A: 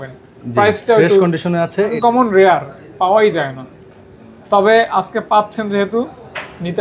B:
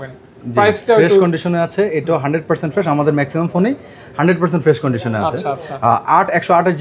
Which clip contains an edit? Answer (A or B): A